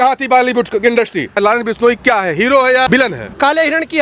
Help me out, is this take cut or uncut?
cut